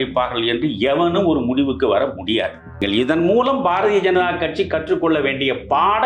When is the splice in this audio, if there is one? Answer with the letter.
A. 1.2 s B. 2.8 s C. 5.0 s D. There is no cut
B